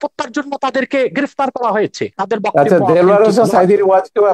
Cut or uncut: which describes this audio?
cut